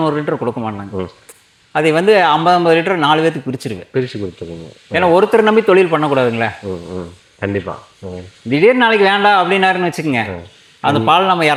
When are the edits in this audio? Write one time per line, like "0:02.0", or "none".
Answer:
none